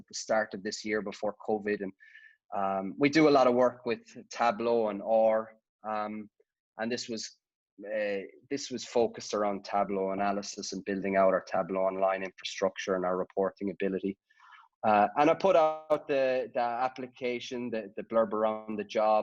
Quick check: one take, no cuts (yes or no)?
yes